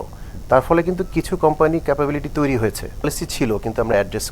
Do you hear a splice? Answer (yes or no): yes